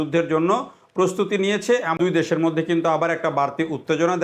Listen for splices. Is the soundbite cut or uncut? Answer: cut